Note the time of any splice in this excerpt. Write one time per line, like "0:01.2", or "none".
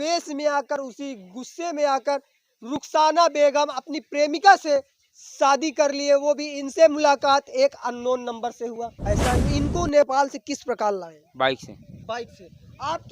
0:09.4

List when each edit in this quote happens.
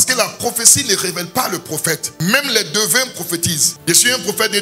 0:03.7

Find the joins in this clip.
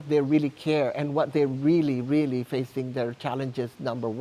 none

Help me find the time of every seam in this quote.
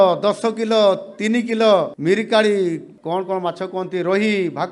0:01.9
0:02.9

